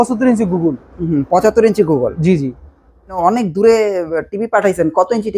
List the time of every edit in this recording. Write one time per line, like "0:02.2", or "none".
0:03.2